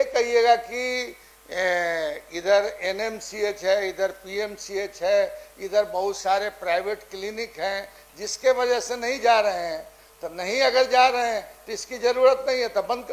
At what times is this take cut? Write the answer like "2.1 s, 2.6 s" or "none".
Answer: none